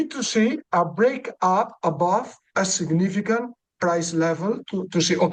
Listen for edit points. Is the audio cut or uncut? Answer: uncut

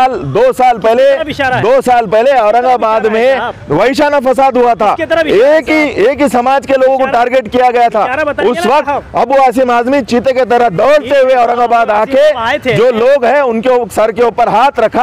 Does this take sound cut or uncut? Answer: uncut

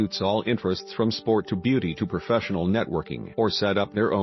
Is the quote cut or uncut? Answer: cut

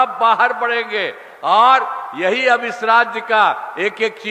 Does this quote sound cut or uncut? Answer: uncut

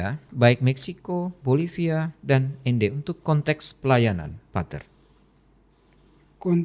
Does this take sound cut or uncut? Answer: uncut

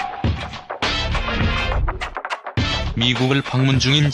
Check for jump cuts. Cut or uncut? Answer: cut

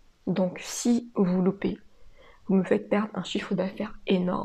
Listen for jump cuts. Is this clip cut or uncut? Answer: uncut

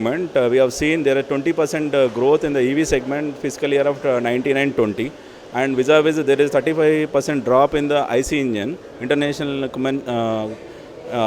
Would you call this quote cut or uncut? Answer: uncut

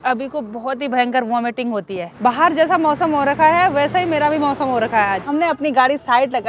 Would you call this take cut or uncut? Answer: cut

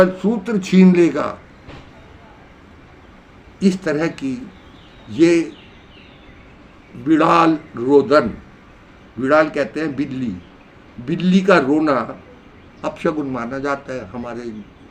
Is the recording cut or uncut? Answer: uncut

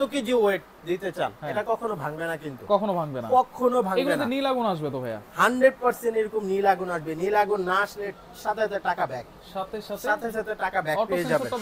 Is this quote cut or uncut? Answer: uncut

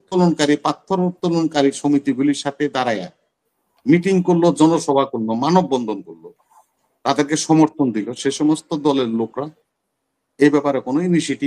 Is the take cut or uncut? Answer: uncut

